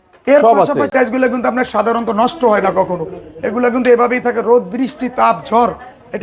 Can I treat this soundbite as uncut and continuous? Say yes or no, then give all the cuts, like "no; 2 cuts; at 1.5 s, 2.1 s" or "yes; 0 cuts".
no; 1 cut; at 0.9 s